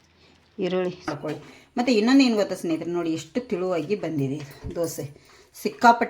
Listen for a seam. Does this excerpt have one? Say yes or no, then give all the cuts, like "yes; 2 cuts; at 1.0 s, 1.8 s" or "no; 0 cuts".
yes; 1 cut; at 1.1 s